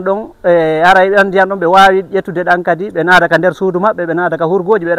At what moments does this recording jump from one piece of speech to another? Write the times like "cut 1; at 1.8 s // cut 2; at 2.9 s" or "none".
none